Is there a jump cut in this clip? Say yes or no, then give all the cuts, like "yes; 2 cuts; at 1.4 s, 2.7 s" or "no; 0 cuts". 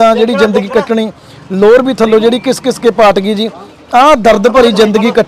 no; 0 cuts